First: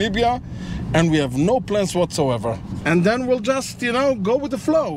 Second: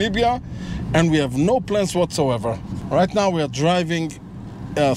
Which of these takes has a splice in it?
first; 1 cut; at 2.7 s

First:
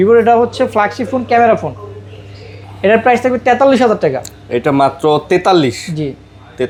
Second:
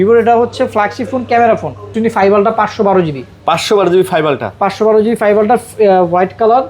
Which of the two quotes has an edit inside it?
second; 1 cut; at 1.9 s

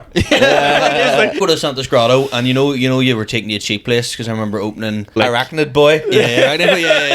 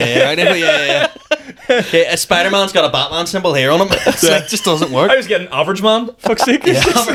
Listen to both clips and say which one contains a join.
first; 2 cuts; at 1.4 s, 5.2 s

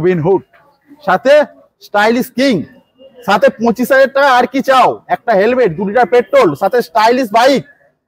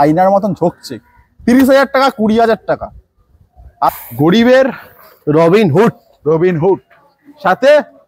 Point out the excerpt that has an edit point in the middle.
second; 1 cut; at 3.9 s

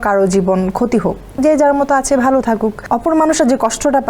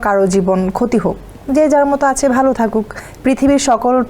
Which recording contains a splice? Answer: first; 2 cuts; at 1.2 s, 2.8 s

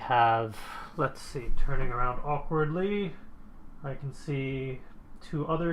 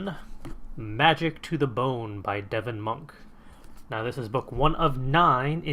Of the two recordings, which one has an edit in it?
first; 1 cut; at 2.0 s

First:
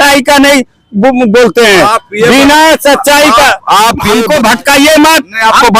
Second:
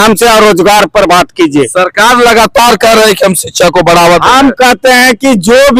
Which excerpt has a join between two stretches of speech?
first; 1 cut; at 4.1 s

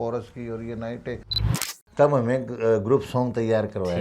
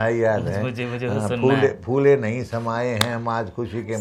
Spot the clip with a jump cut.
first; 1 cut; at 1.4 s

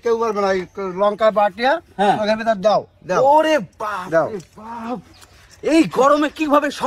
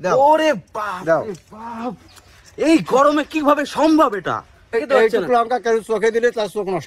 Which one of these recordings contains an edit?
second; 1 cut; at 4.7 s

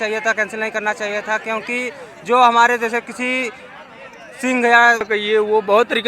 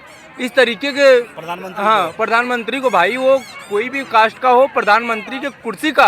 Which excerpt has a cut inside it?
first; 1 cut; at 5.1 s

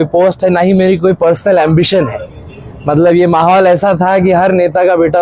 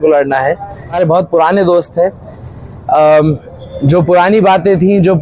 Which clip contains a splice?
second; 1 cut; at 0.9 s

